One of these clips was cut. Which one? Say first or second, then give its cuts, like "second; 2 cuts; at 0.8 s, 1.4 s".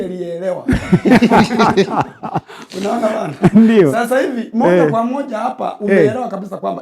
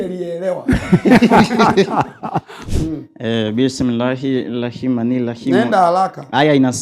second; 1 cut; at 2.6 s